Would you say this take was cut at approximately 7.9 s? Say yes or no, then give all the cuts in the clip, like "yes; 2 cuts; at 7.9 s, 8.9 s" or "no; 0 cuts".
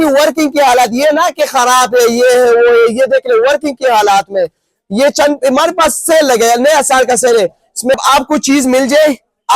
yes; 1 cut; at 7.9 s